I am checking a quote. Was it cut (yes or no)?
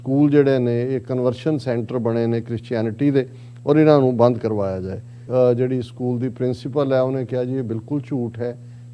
yes